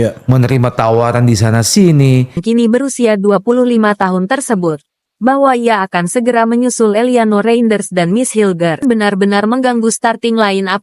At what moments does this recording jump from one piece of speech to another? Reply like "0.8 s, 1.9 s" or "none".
2.4 s, 8.8 s